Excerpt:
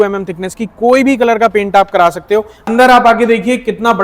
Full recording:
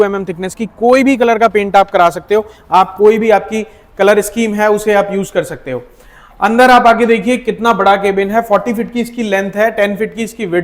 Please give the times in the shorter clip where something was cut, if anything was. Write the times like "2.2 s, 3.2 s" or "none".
2.6 s